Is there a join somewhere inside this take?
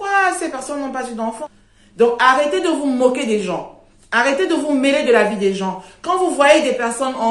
yes; 1 cut; at 1.4 s

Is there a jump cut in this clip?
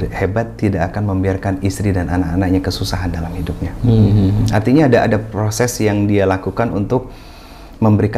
no; 0 cuts

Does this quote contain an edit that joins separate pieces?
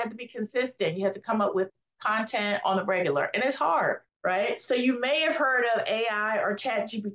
no; 0 cuts

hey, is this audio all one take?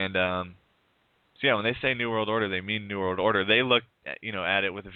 yes; 0 cuts

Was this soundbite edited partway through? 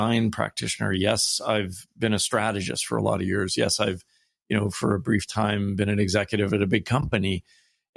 no; 0 cuts

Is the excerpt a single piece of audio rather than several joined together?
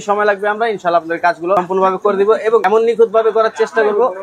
no; 2 cuts; at 1.6 s, 2.6 s

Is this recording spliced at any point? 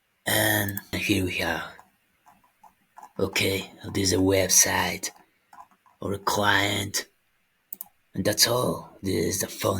yes; 1 cut; at 0.9 s

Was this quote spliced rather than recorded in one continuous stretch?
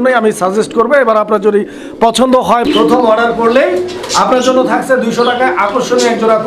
yes; 1 cut; at 2.7 s

